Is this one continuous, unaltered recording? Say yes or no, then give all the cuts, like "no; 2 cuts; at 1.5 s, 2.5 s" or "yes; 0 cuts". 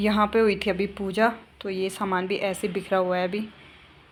yes; 0 cuts